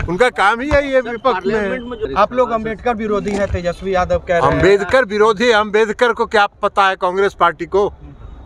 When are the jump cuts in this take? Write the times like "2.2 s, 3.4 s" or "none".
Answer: 2.0 s